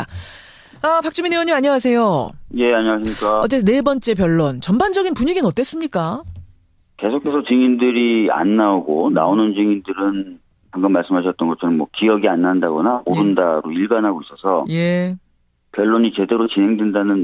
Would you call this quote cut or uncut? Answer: cut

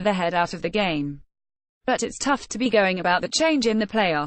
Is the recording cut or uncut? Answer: cut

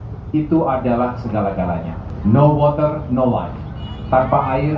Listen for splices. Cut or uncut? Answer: cut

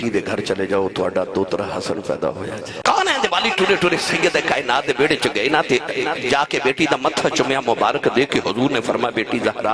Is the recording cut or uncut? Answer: cut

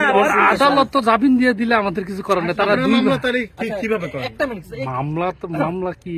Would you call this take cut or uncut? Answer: uncut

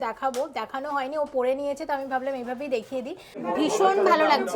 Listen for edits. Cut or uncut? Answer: cut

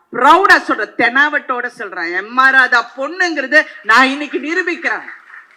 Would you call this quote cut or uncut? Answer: uncut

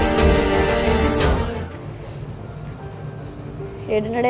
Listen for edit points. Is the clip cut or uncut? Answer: uncut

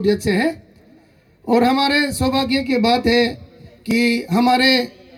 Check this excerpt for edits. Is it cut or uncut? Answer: uncut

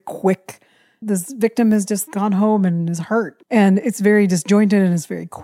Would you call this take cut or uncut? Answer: cut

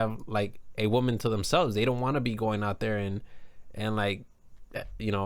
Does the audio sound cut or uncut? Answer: uncut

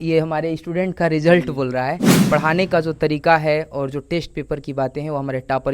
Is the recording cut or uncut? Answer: cut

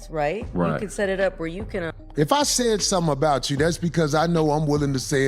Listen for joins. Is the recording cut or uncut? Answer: cut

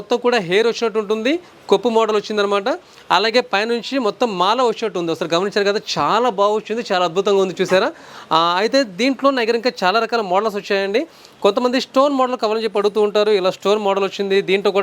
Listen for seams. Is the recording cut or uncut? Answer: uncut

